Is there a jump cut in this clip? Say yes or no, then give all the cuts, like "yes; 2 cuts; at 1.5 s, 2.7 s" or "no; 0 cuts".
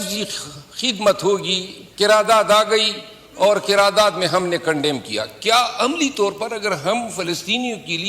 no; 0 cuts